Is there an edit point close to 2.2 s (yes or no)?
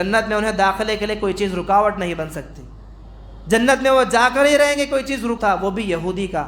no